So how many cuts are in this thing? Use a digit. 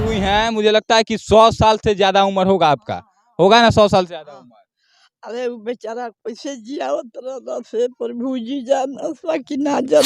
0